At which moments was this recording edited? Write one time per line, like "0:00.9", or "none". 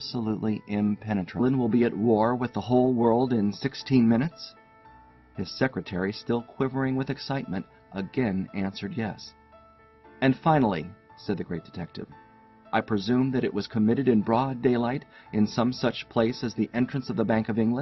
none